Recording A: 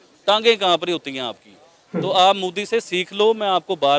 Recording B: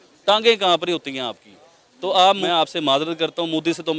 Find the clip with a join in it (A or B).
B